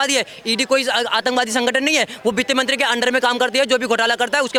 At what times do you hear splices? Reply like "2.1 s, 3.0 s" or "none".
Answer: none